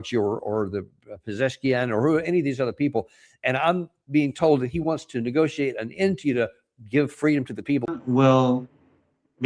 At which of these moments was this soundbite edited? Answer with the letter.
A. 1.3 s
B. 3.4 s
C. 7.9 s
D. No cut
C